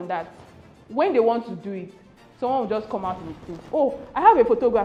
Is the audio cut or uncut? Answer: uncut